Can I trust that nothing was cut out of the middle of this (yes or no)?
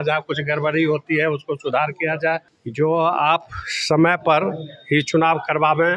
no